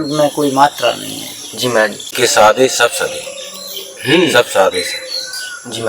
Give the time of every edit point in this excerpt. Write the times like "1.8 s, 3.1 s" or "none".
2.1 s